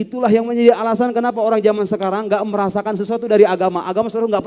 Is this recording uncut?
yes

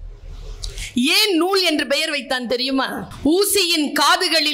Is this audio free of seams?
no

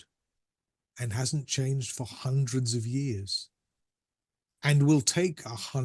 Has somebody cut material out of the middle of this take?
no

